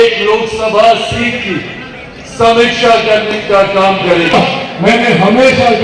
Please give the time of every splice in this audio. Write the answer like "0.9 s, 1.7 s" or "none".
4.3 s